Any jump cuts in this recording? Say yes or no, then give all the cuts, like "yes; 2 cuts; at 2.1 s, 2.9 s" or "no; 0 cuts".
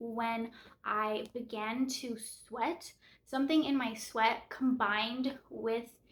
no; 0 cuts